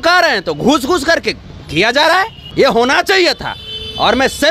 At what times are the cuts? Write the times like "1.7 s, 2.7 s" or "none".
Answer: 2.4 s